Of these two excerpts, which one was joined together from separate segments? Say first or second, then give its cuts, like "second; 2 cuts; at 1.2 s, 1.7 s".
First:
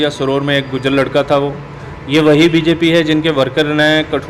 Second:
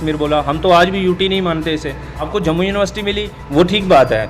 second; 1 cut; at 2.3 s